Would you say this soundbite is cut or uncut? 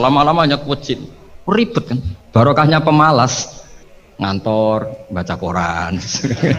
uncut